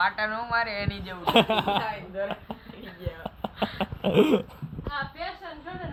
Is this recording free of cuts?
yes; 0 cuts

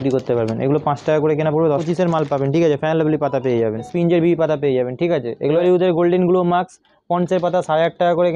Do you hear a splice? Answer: yes; 3 cuts; at 1.8 s, 3.9 s, 5.6 s

